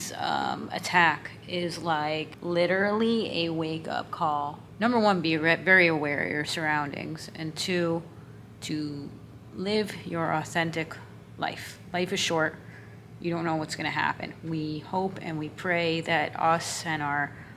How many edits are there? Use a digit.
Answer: 2